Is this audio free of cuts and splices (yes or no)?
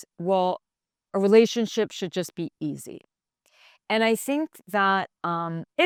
yes